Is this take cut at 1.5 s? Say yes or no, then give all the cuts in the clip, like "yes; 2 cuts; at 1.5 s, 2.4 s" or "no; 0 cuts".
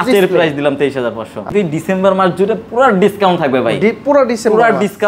yes; 1 cut; at 1.5 s